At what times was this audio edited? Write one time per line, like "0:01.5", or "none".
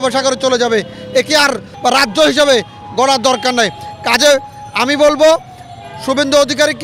0:01.7